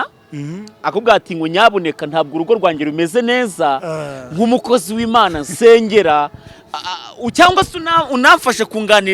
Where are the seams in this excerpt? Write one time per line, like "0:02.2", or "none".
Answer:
none